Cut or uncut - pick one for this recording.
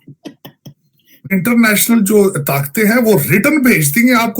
cut